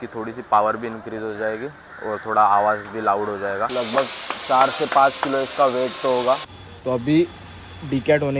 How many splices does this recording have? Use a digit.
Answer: 2